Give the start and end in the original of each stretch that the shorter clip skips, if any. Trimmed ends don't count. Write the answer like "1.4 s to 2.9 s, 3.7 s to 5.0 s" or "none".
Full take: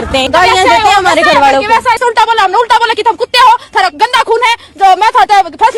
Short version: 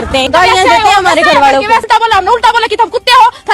1.8 s to 2.1 s